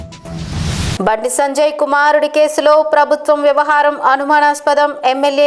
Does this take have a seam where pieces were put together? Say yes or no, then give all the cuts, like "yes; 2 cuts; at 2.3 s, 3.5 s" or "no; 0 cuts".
yes; 1 cut; at 1.0 s